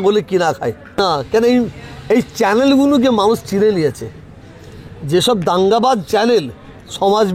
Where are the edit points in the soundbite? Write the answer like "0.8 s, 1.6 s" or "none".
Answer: 1.0 s